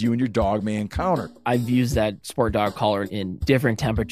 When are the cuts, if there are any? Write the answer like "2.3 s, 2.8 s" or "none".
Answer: 1.4 s, 3.1 s